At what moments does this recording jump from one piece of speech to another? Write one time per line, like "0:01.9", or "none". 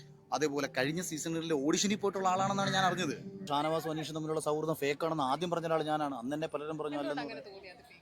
0:03.5